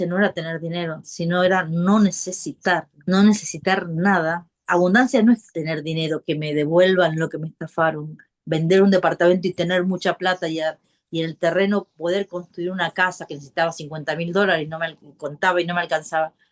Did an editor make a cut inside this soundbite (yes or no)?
yes